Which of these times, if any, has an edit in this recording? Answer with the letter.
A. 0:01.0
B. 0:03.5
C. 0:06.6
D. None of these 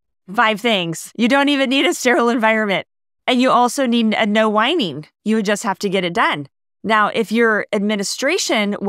A